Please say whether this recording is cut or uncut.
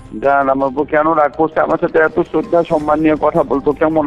uncut